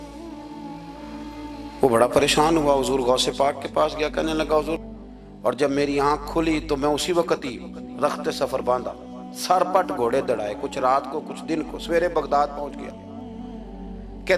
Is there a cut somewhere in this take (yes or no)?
yes